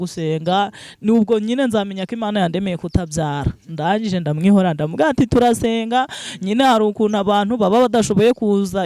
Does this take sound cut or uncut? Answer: uncut